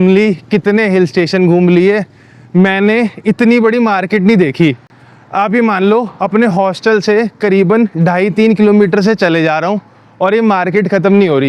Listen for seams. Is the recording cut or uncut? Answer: uncut